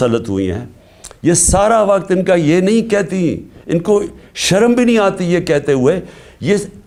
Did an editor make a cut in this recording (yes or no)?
no